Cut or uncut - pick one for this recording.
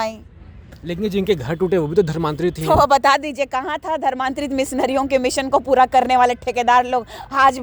uncut